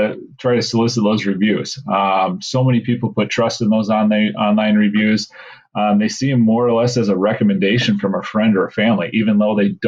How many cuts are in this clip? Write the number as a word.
zero